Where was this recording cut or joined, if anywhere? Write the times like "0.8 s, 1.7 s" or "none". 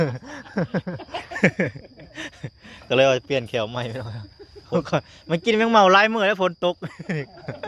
4.7 s